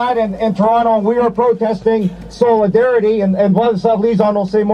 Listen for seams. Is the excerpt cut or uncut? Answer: uncut